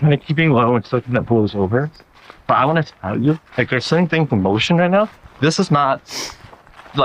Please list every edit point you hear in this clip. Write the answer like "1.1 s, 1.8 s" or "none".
none